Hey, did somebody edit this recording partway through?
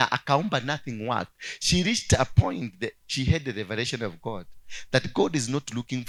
no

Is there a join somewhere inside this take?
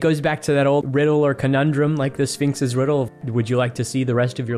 yes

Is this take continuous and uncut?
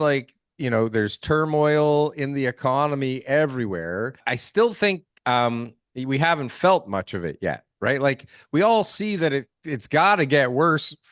no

